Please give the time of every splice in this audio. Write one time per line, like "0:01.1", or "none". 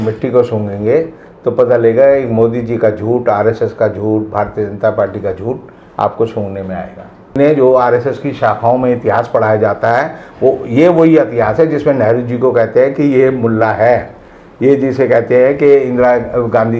0:07.3